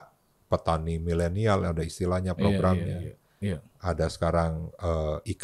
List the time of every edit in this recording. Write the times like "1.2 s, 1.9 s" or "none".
none